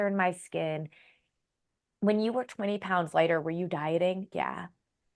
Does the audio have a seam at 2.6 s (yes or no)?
no